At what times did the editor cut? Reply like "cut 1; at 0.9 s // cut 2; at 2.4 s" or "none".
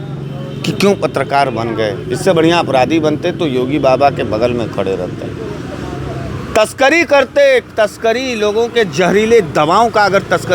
none